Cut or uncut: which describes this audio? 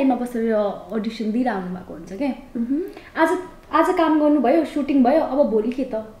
uncut